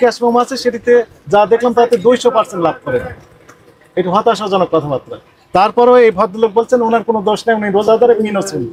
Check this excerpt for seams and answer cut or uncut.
uncut